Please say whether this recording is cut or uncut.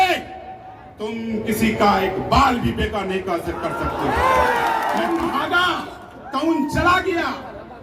cut